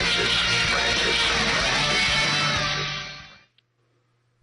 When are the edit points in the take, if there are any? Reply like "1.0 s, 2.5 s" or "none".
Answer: 2.9 s